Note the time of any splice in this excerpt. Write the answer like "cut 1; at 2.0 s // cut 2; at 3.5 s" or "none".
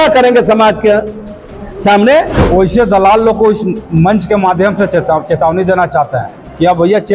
cut 1; at 2.4 s